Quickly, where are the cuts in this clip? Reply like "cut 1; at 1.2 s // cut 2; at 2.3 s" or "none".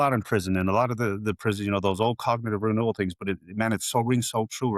none